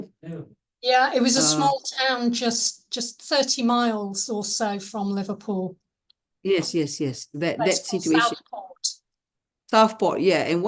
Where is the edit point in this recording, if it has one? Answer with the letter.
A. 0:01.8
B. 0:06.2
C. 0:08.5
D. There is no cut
D